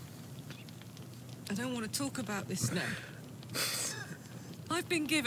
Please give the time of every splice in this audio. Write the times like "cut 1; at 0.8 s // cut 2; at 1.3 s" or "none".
none